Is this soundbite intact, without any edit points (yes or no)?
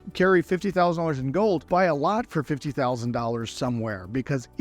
no